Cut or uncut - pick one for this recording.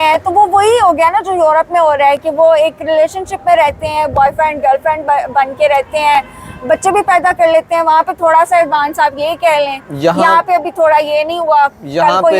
uncut